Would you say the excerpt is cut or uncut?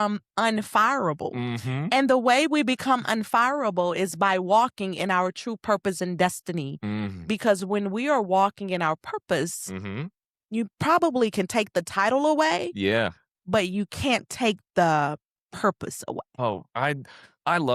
cut